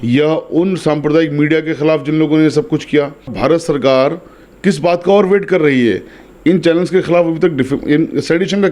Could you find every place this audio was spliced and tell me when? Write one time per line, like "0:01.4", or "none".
0:03.3